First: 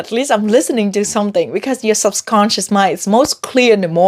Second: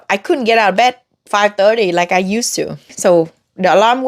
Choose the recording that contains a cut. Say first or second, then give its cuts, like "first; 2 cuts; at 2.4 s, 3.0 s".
second; 1 cut; at 2.9 s